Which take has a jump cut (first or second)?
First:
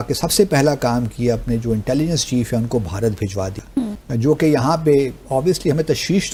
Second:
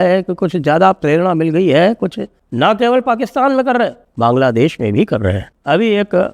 second